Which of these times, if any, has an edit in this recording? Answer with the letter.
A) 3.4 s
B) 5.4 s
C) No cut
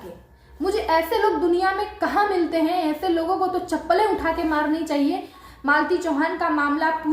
B